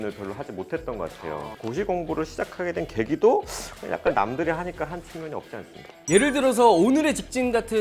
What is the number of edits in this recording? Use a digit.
2